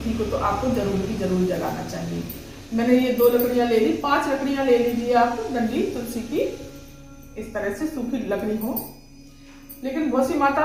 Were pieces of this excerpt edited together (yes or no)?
no